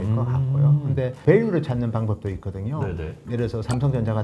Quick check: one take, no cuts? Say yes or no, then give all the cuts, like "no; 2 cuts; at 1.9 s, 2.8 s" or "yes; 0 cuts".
no; 2 cuts; at 1.2 s, 3.2 s